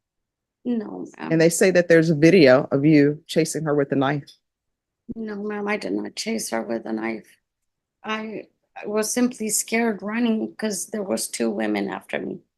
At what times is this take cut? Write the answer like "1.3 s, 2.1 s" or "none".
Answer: none